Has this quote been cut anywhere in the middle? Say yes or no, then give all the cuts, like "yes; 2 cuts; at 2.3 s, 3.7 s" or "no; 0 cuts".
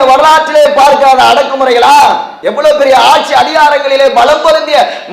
yes; 1 cut; at 2.3 s